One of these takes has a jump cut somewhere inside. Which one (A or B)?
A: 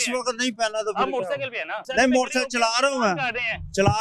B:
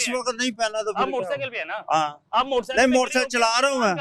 A